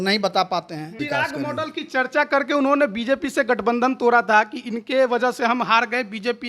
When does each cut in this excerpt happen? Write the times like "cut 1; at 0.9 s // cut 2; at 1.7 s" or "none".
cut 1; at 1.0 s